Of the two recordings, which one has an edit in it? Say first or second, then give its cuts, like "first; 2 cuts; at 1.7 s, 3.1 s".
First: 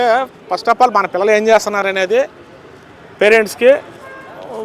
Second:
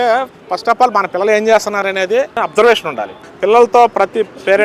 second; 2 cuts; at 2.3 s, 3.2 s